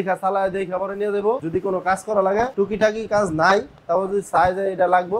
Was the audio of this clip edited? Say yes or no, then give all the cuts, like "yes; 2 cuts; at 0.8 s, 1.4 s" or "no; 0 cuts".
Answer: yes; 2 cuts; at 1.4 s, 2.5 s